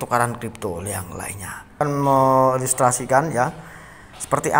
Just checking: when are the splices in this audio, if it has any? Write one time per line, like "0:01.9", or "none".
0:01.8